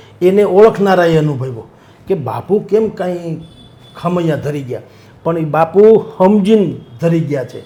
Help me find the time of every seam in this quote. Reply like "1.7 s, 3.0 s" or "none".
none